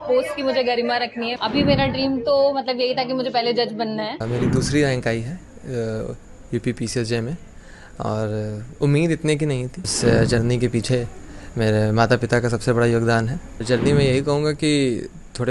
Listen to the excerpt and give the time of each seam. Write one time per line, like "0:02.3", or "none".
0:01.3
0:04.2
0:09.9
0:13.6